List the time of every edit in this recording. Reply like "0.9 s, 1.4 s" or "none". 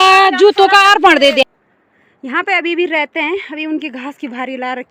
1.4 s